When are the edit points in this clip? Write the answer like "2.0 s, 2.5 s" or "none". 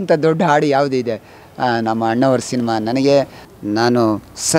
3.4 s